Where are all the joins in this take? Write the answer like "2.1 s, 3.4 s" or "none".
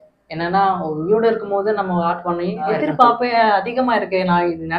2.8 s